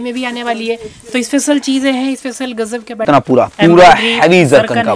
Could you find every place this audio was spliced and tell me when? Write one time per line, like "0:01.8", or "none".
0:03.0